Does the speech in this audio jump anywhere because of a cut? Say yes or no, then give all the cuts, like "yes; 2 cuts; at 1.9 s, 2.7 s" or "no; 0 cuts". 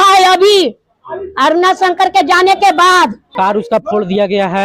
yes; 1 cut; at 3.2 s